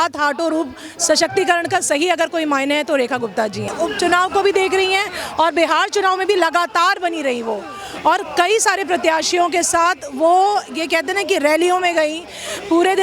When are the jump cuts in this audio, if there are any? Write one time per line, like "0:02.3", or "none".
0:03.7